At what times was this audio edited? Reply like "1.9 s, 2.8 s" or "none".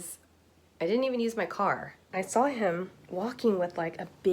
2.0 s

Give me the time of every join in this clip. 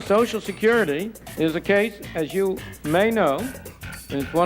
1.2 s, 2.7 s

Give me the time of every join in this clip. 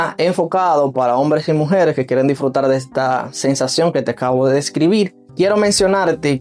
5.2 s

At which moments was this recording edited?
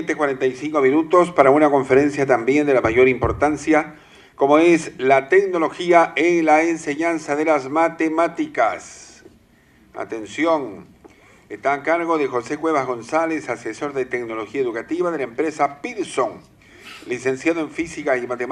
none

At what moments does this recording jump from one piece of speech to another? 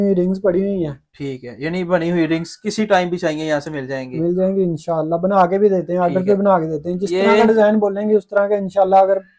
none

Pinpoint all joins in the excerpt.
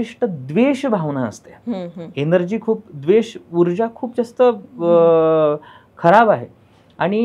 none

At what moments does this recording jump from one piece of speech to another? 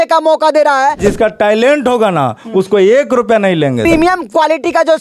1.0 s, 3.8 s

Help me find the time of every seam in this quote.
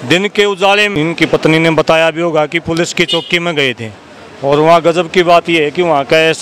0.9 s

